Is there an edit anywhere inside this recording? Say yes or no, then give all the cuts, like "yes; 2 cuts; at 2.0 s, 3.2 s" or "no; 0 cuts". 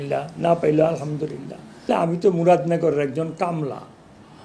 yes; 1 cut; at 1.9 s